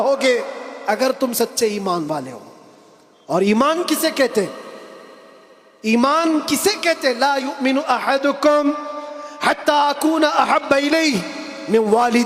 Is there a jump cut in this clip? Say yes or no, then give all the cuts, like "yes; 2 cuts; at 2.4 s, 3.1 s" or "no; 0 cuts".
no; 0 cuts